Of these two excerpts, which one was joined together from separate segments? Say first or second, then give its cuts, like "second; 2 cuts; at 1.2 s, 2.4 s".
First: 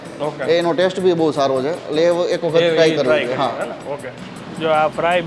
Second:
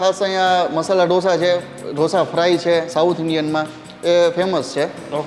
first; 1 cut; at 4.3 s